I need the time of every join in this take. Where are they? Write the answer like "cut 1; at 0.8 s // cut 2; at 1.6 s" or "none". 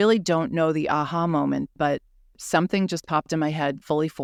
none